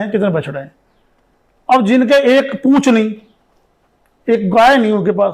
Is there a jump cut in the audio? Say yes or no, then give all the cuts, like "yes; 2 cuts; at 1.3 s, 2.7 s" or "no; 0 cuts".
no; 0 cuts